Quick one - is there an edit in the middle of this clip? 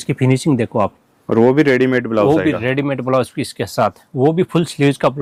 no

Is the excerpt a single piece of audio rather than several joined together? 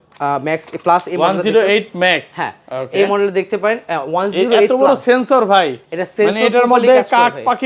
yes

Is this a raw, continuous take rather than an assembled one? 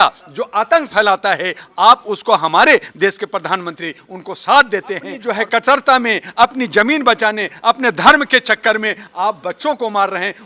no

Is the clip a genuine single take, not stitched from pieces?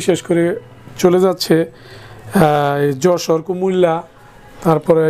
yes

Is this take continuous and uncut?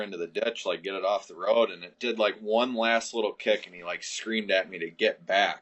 yes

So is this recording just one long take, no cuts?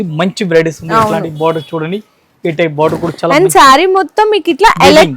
yes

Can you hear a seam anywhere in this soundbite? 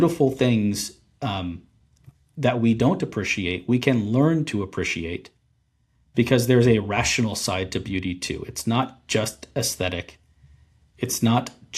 no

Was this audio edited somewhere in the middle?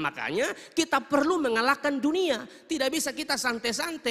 no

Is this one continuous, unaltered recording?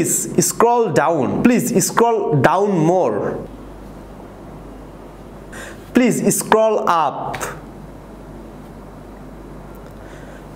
no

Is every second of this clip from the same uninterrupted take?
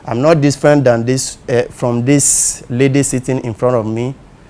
yes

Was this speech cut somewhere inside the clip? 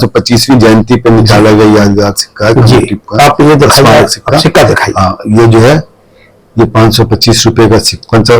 no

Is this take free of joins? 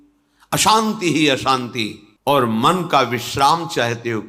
no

